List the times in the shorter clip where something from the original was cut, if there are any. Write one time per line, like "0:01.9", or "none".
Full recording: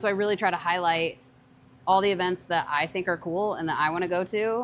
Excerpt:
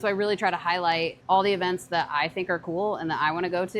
0:01.2

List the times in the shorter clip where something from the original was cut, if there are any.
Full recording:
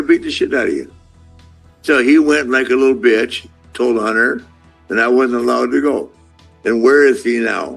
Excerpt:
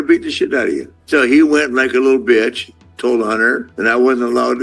0:00.9
0:03.7

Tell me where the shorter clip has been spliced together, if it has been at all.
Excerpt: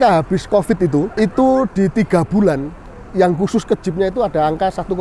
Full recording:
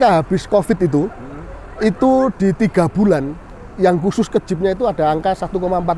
0:01.1

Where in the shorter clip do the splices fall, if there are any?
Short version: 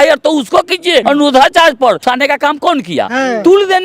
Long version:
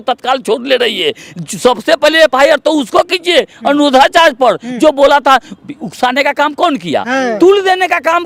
0:01.0
0:02.0

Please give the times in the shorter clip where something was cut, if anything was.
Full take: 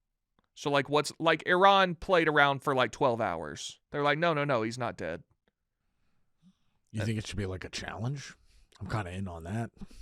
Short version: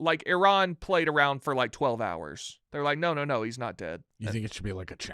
0:04.1

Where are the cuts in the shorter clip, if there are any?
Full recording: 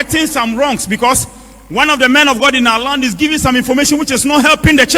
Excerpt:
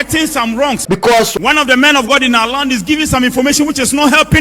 0:00.9

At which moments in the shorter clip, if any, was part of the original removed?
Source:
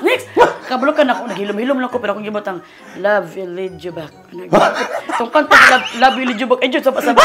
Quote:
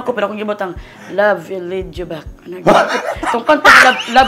none

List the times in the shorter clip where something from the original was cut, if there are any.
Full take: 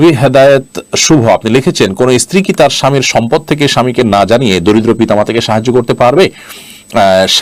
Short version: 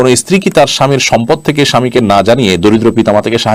none

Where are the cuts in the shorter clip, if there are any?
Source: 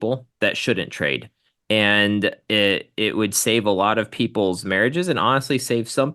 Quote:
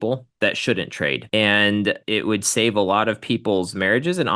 0:01.2
0:02.0

